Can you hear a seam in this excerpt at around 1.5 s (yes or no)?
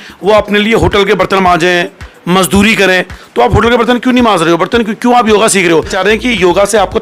no